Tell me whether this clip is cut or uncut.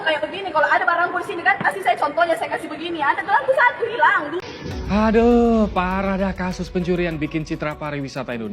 cut